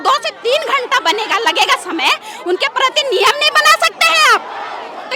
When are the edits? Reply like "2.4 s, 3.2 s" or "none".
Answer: none